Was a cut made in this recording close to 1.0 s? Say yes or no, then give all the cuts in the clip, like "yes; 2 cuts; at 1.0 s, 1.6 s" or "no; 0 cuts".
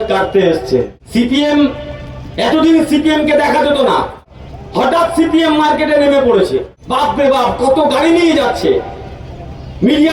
yes; 1 cut; at 1.0 s